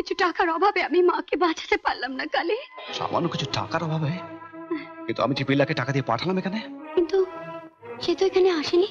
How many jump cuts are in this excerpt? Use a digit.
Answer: 0